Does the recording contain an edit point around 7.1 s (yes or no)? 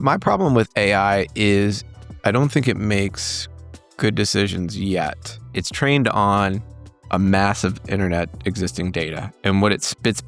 no